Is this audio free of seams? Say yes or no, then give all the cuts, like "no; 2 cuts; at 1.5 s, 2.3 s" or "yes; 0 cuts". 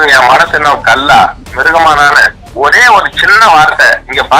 no; 1 cut; at 2.4 s